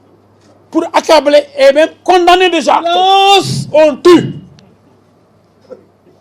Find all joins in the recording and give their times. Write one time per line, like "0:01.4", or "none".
0:02.9